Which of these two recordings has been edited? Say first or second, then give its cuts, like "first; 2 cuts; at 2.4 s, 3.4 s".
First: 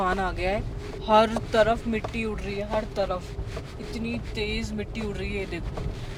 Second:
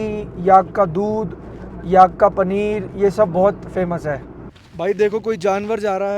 second; 1 cut; at 4.6 s